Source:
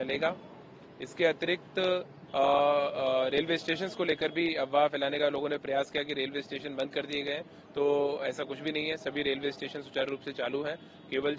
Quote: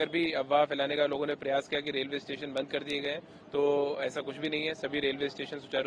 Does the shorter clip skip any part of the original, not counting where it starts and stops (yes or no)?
no